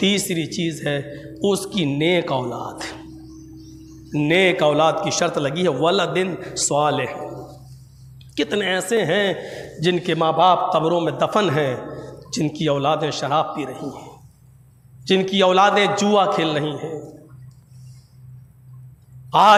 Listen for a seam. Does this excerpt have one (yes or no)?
no